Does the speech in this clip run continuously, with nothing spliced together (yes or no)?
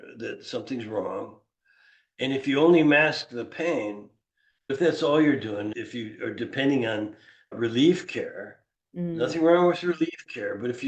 no